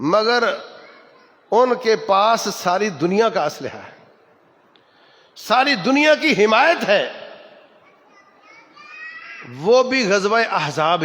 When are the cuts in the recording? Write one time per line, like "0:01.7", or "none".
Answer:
none